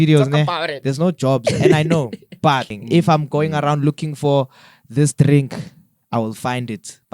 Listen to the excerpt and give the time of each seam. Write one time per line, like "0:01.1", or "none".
0:02.8